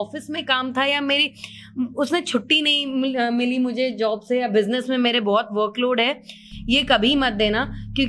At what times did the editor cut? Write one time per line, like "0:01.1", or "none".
none